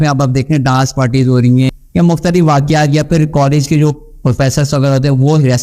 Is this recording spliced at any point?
yes; 1 cut; at 1.7 s

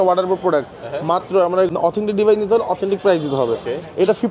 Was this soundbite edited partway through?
yes; 1 cut; at 1.7 s

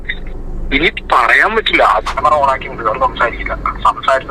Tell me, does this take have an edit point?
yes; 1 cut; at 2.2 s

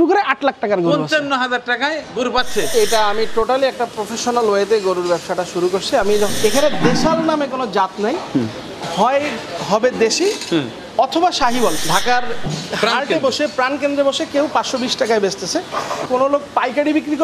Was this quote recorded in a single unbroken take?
no; 4 cuts; at 2.7 s, 6.3 s, 11.8 s, 16.1 s

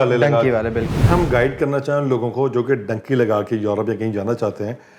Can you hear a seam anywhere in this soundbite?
yes; 1 cut; at 1.0 s

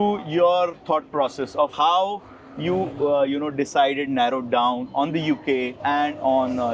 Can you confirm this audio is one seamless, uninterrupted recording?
yes; 0 cuts

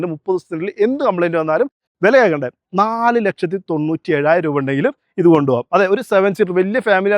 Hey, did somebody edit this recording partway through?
yes; 1 cut; at 1.8 s

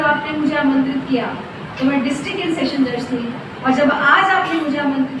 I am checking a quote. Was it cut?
no; 0 cuts

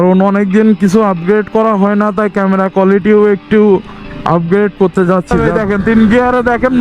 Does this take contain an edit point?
yes; 1 cut; at 5.4 s

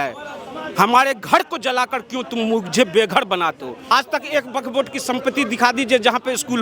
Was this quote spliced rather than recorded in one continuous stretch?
yes; 1 cut; at 3.9 s

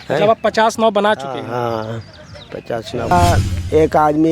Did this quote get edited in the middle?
yes; 1 cut; at 3.1 s

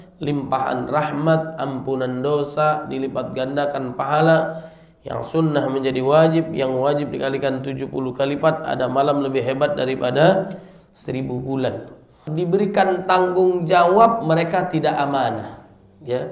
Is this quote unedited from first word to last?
no; 1 cut; at 12.2 s

